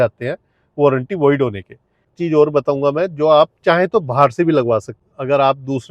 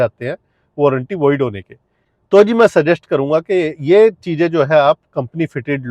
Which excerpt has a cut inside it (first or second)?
first